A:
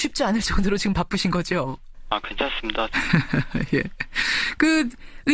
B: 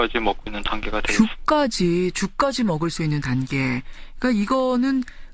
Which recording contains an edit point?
A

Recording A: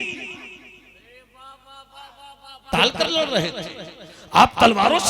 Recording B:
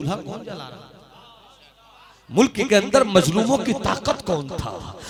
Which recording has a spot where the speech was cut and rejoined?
A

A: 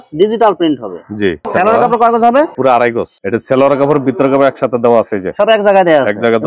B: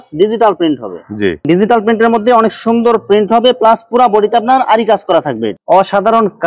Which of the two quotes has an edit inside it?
B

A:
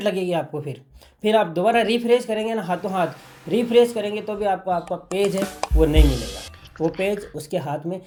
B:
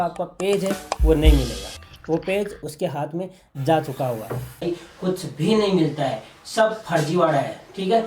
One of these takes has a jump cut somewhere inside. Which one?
B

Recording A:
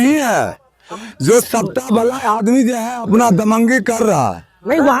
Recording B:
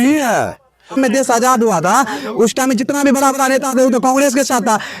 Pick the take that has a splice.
B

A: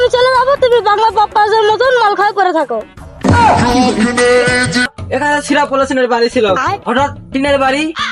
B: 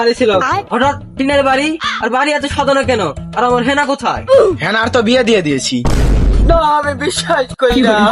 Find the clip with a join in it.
A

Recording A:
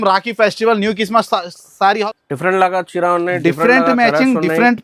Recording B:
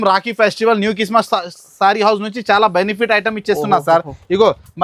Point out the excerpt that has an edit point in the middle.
A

